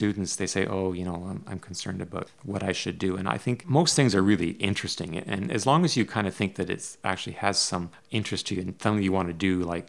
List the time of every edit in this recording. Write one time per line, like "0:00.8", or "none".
0:08.0